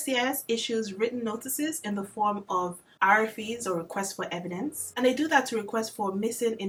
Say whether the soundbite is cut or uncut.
uncut